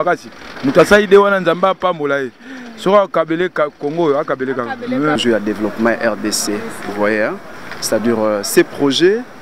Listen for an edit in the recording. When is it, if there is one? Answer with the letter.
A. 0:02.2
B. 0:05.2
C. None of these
B